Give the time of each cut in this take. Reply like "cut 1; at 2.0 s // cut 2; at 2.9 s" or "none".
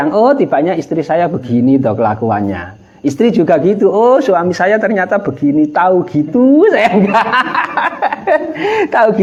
none